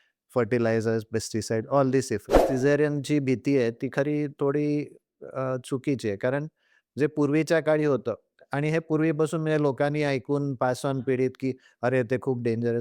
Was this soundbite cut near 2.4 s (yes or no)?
yes